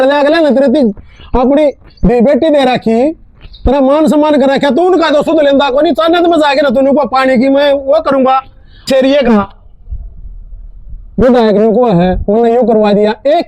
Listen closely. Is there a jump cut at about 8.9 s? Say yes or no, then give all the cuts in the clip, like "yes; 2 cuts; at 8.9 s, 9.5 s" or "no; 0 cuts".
yes; 1 cut; at 8.9 s